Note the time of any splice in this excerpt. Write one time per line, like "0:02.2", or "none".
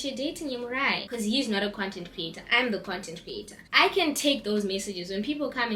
none